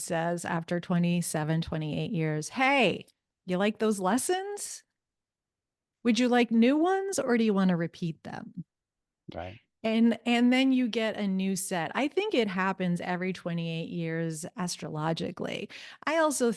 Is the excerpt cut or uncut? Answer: uncut